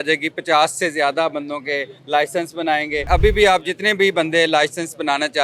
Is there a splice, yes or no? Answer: yes